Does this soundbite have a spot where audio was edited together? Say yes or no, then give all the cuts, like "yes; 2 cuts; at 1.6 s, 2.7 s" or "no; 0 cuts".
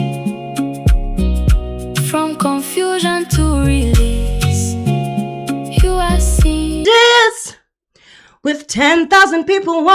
yes; 1 cut; at 6.8 s